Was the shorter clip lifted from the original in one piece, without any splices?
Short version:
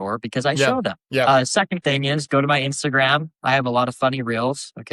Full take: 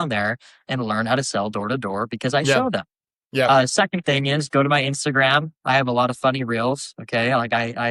no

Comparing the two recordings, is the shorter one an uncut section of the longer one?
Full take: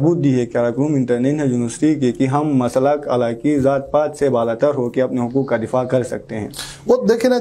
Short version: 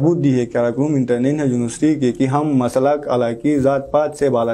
yes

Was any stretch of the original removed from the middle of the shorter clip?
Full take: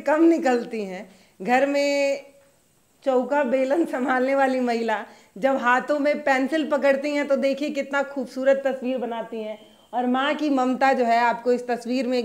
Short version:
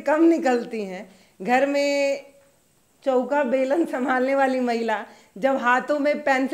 no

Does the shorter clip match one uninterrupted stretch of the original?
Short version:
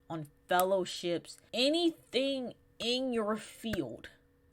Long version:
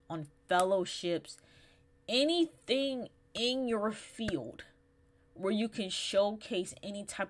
no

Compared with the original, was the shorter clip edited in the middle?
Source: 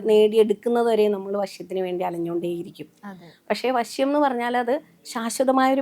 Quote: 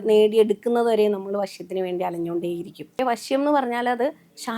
yes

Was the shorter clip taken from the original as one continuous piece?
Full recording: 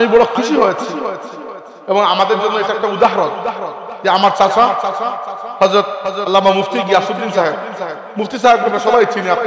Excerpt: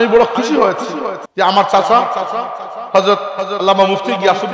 no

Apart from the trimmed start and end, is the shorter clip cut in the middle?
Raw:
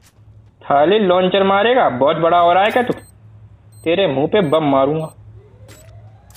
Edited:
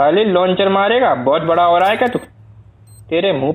no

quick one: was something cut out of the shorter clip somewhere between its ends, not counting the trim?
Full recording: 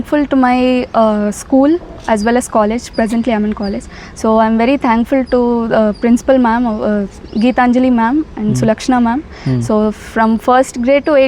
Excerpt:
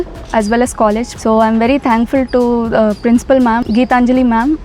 yes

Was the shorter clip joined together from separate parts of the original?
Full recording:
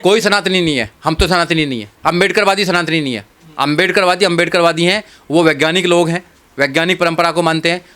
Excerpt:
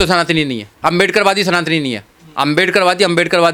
no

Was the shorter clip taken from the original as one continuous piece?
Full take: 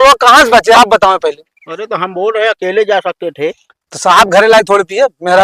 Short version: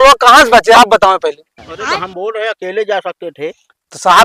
yes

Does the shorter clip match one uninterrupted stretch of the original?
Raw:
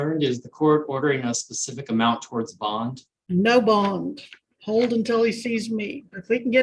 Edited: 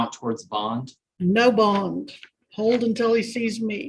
yes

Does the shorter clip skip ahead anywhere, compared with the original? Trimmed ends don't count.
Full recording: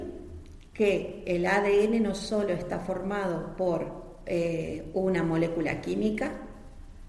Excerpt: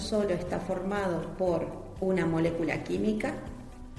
yes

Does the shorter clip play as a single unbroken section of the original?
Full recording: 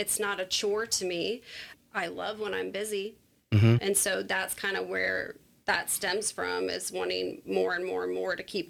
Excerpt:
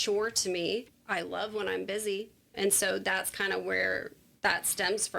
no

